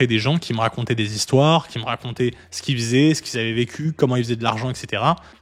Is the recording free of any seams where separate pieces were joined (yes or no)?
yes